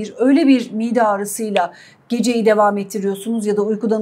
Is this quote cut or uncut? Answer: uncut